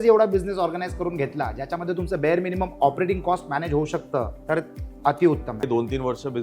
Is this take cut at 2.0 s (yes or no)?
no